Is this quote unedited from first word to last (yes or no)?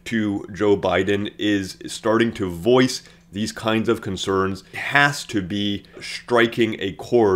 no